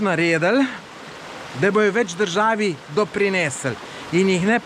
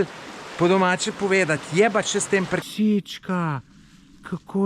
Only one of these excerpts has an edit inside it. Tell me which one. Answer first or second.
second